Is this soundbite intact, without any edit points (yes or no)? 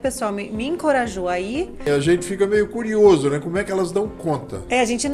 no